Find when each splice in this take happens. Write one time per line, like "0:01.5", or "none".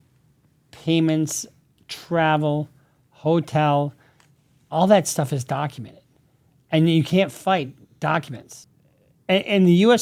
none